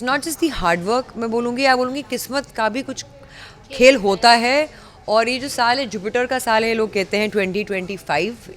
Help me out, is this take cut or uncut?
uncut